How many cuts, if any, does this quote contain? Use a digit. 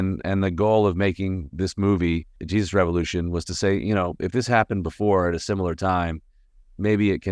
1